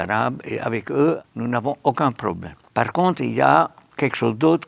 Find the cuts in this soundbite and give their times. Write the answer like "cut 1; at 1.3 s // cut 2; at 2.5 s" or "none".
cut 1; at 1.3 s // cut 2; at 2.5 s